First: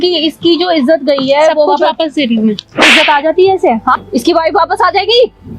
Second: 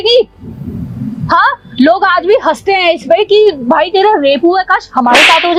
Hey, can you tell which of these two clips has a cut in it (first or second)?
first